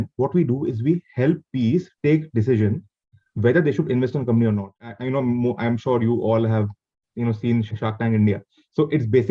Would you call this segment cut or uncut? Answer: cut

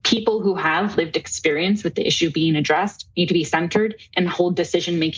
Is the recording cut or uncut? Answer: uncut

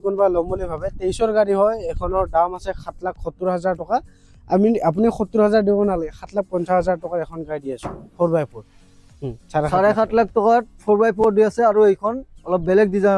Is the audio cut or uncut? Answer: cut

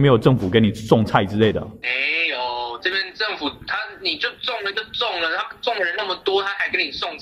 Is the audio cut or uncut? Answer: uncut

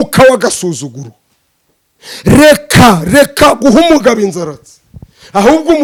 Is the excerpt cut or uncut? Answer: uncut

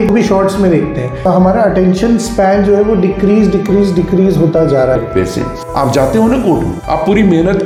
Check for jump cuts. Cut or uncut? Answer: uncut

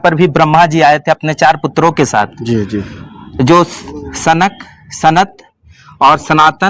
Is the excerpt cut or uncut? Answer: uncut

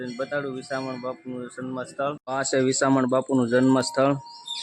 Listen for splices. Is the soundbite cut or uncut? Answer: cut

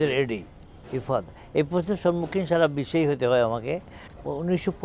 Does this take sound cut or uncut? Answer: uncut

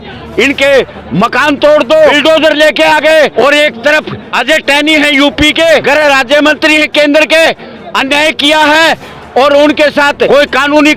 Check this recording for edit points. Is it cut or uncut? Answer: cut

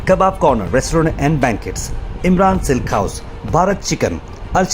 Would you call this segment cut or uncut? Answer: uncut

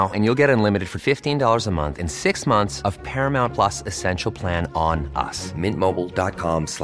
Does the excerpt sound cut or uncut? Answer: uncut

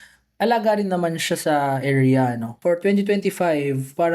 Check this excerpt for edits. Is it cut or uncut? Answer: cut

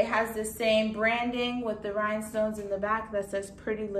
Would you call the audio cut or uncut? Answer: uncut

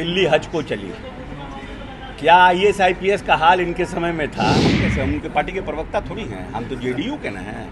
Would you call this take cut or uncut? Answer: cut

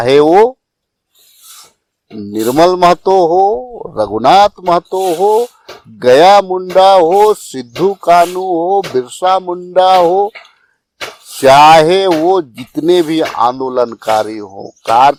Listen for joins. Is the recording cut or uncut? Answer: uncut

